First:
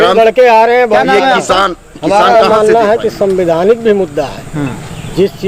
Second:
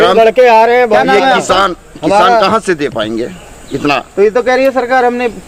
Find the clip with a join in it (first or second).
first